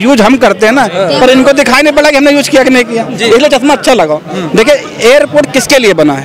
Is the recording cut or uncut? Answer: uncut